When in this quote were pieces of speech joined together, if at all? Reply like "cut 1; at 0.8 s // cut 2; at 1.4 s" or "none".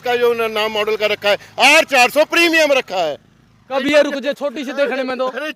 cut 1; at 3.7 s